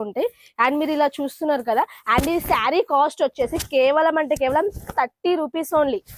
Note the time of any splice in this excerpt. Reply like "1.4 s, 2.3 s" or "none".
none